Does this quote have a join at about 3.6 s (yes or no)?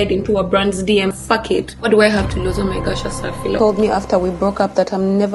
yes